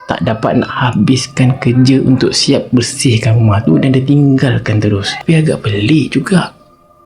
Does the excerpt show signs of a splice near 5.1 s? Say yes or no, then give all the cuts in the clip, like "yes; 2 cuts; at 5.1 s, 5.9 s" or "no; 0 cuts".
yes; 1 cut; at 5.1 s